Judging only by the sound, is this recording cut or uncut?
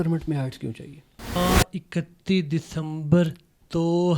cut